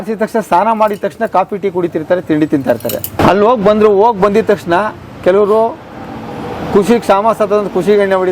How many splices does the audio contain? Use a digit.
0